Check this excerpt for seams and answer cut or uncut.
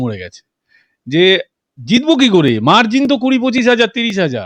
uncut